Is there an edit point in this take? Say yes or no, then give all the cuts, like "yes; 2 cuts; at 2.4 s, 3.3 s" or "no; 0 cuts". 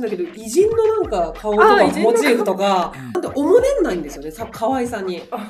yes; 1 cut; at 3.1 s